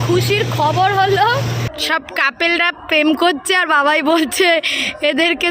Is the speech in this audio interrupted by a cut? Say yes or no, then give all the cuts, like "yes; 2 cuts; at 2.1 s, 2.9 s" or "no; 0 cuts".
yes; 1 cut; at 1.7 s